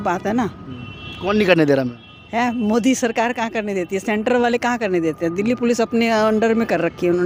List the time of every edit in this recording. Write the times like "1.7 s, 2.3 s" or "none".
none

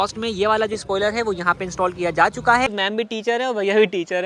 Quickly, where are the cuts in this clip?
2.8 s

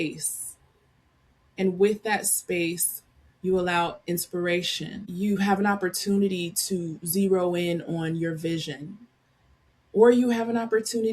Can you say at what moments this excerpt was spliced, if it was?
5.0 s

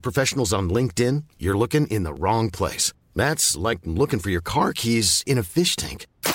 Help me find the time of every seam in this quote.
none

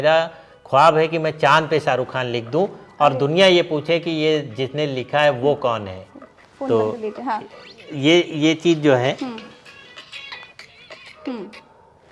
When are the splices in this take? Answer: none

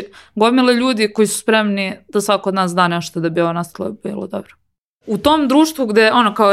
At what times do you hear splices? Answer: 5.1 s

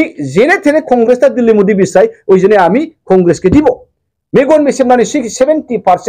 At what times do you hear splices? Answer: none

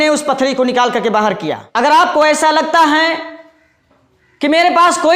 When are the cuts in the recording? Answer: 1.6 s

